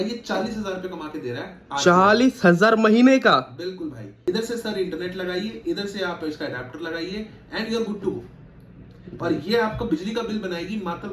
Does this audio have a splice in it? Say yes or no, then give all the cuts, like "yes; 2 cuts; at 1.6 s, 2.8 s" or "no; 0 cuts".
yes; 1 cut; at 4.1 s